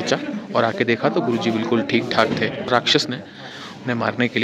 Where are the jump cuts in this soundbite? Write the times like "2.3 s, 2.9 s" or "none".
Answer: none